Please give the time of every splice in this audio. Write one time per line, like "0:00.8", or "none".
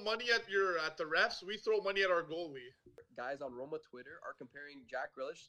0:03.0